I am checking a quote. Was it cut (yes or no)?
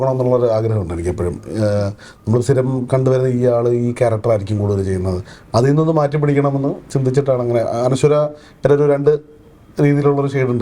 no